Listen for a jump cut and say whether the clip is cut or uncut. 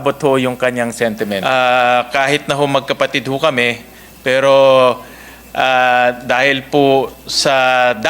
cut